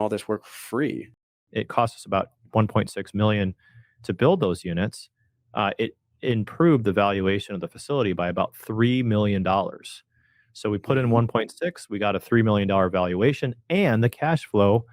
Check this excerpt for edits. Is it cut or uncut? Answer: cut